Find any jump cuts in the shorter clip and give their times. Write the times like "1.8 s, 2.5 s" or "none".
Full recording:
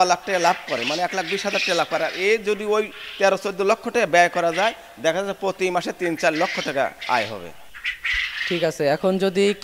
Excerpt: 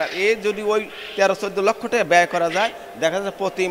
none